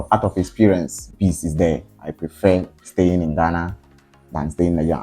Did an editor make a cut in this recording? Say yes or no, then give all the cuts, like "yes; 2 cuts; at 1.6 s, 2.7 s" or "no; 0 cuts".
yes; 2 cuts; at 1.1 s, 2.0 s